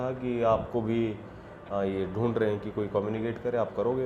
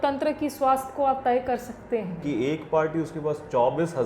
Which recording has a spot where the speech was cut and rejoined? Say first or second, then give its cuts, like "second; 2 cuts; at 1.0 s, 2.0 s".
second; 1 cut; at 2.2 s